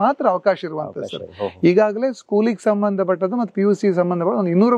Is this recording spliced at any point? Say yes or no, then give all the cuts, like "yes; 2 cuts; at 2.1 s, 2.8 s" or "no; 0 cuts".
no; 0 cuts